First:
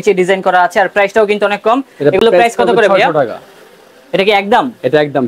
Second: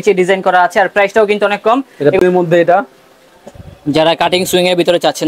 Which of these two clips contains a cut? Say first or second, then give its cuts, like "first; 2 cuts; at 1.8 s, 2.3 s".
second; 1 cut; at 2.2 s